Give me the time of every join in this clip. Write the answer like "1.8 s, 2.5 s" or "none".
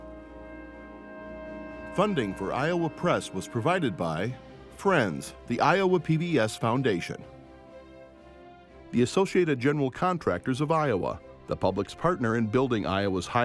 1.9 s